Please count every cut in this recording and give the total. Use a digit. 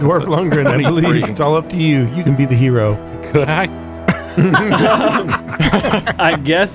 1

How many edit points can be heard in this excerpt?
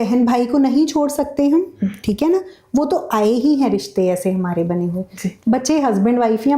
1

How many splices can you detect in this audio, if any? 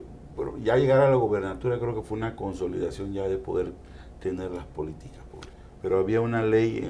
1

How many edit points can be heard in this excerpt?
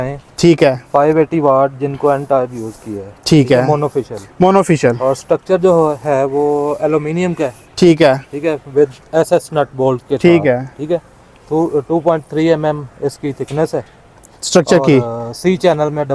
0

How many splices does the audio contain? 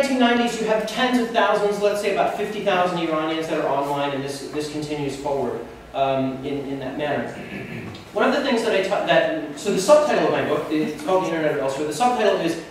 1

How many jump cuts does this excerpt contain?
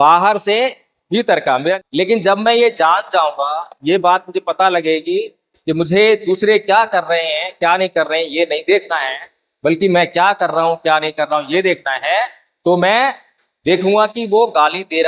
1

